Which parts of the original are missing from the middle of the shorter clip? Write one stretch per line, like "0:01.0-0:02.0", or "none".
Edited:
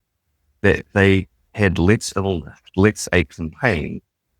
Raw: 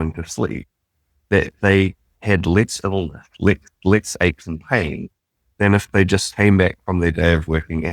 0:03.3-0:03.7

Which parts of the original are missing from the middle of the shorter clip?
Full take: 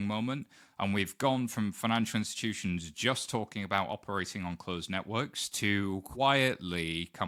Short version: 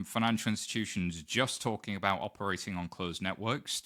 none

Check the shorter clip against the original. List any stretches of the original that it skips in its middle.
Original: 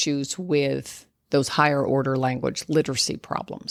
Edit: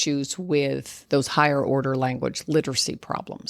0:00.9-0:01.1

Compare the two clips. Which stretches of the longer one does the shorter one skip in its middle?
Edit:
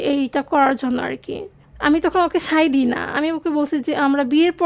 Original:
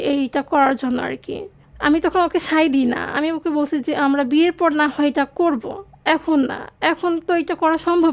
none

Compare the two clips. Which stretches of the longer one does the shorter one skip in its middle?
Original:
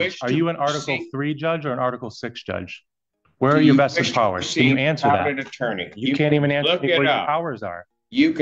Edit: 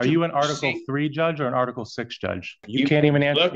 0:02.8-0:05.9

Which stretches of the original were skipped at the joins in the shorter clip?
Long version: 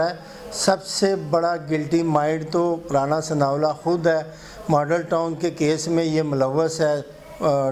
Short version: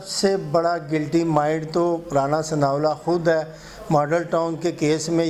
none

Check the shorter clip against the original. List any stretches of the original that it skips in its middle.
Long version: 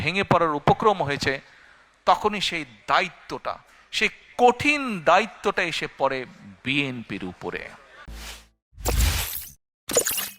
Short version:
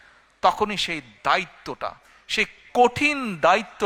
none

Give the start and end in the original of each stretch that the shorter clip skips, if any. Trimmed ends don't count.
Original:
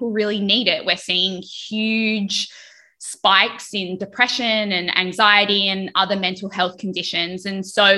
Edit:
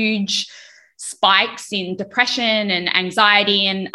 none

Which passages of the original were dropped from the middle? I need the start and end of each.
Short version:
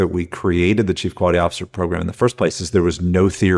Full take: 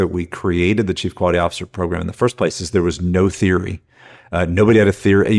none

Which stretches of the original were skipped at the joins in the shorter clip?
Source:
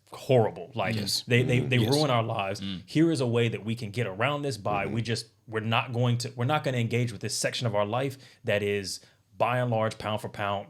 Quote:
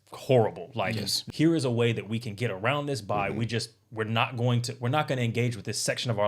0:01.1-0:02.7

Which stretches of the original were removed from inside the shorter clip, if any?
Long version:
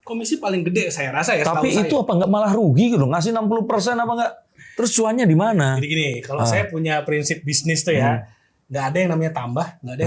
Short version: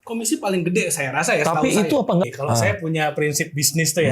0:02.2-0:06.2

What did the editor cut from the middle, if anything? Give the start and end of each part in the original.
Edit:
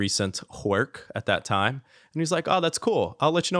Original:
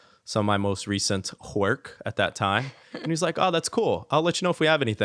none

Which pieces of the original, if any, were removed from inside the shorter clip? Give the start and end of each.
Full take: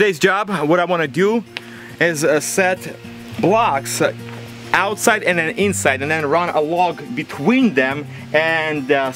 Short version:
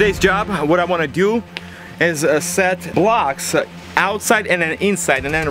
0:02.8-0:03.3
0:04.3-0:04.6

